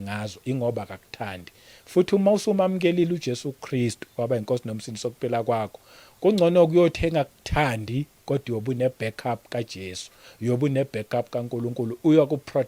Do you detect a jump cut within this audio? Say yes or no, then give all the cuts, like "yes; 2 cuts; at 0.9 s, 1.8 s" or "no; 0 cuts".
no; 0 cuts